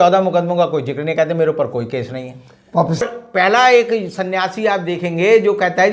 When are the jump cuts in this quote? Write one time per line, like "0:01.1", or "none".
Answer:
0:03.0